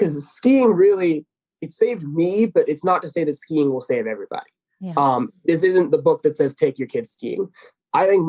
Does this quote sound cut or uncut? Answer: uncut